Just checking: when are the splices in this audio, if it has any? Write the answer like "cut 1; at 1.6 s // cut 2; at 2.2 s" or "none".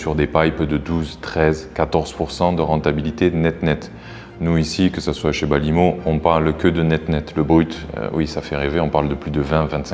none